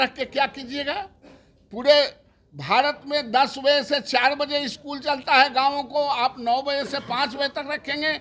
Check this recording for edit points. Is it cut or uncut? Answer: uncut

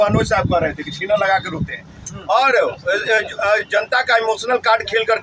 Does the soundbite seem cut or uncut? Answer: uncut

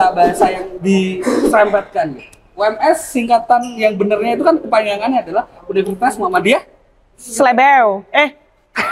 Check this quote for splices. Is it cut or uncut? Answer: uncut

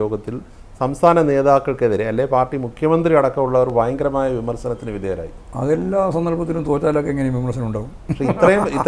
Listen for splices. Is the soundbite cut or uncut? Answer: uncut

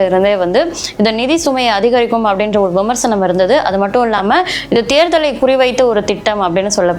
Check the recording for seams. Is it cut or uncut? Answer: uncut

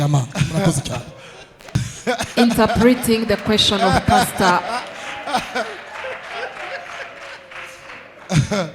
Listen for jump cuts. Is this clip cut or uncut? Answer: uncut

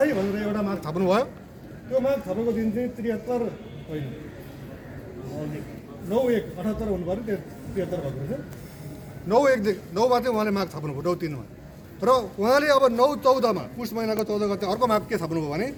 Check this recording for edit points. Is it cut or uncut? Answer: uncut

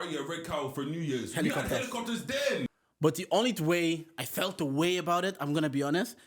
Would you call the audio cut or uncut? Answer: cut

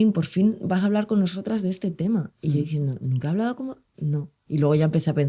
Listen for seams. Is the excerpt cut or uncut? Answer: cut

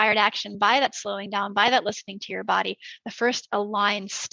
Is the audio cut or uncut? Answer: uncut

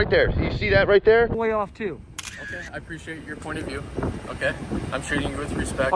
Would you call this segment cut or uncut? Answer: cut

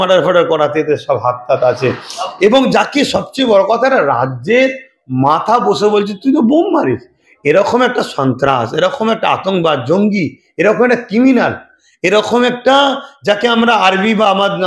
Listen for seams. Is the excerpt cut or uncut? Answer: uncut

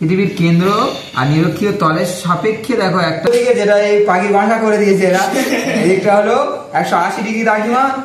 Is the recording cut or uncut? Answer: cut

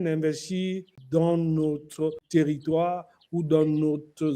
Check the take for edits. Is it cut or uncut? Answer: cut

